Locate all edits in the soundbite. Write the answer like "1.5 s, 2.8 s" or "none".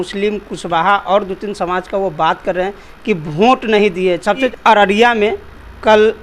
4.5 s